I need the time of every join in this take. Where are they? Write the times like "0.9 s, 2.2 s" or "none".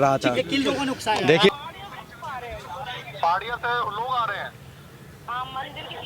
1.5 s